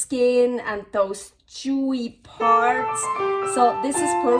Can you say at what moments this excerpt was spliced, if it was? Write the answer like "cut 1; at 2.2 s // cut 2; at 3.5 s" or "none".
none

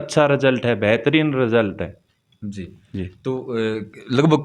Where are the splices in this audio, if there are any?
none

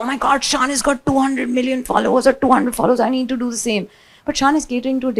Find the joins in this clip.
none

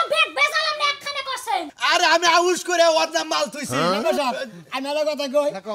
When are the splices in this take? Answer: cut 1; at 1.8 s

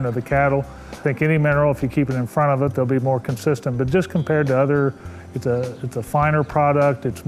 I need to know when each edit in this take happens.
cut 1; at 1.0 s

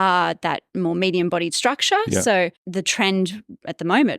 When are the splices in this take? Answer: none

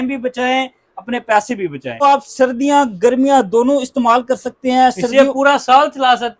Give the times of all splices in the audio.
cut 1; at 2.0 s

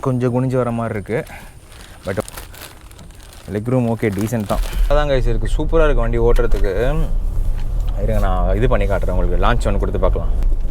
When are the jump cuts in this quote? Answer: cut 1; at 2.2 s // cut 2; at 4.9 s

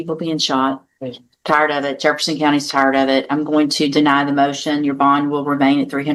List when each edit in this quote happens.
none

